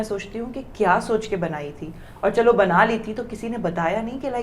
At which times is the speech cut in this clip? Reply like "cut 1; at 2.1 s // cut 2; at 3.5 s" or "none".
none